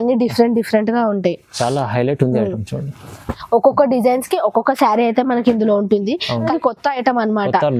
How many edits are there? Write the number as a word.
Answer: one